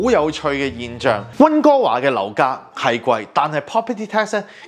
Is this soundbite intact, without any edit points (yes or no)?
no